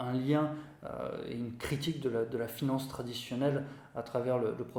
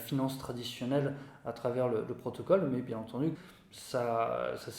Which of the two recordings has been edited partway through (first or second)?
second